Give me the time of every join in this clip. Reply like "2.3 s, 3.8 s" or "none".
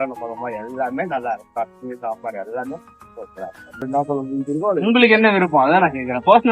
3.8 s